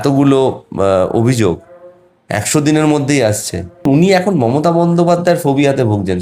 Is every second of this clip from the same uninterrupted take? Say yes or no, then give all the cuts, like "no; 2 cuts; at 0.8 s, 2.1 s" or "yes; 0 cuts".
no; 1 cut; at 3.8 s